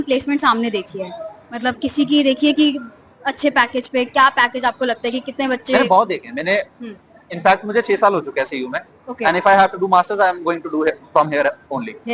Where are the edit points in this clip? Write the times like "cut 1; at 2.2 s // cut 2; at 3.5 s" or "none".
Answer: none